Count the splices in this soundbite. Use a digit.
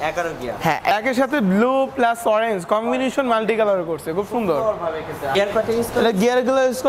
2